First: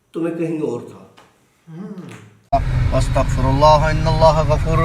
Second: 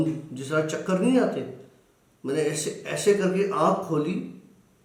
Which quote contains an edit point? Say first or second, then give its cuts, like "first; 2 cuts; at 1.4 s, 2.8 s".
first; 1 cut; at 2.4 s